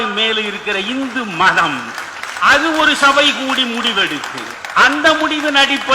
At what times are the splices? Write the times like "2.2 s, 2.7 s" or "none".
4.6 s